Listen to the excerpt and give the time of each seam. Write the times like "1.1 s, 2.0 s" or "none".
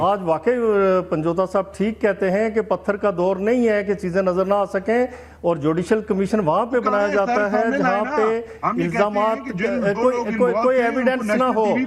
none